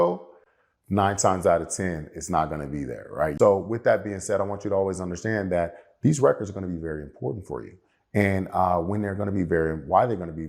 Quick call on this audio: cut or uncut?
cut